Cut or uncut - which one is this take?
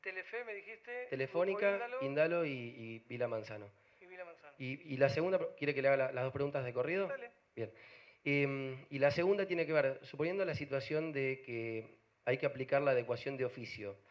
cut